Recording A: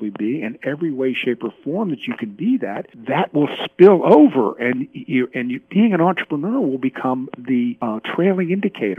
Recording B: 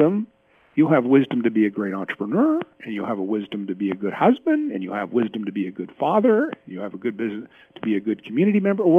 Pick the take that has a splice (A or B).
A